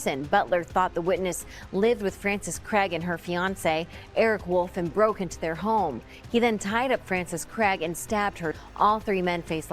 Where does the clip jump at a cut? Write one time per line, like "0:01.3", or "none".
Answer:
none